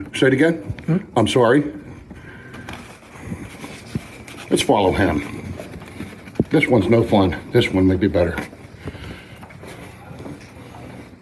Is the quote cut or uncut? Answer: uncut